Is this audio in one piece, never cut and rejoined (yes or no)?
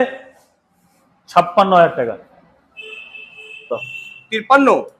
no